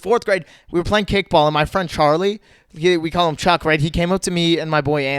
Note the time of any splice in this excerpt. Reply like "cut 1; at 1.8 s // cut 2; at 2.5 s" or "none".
none